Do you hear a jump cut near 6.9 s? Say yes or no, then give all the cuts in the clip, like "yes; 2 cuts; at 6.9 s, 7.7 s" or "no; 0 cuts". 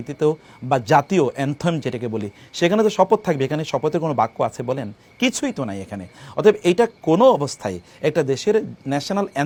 no; 0 cuts